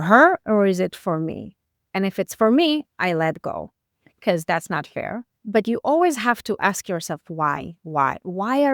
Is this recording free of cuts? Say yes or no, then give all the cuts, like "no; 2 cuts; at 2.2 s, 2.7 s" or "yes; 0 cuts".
no; 1 cut; at 5.4 s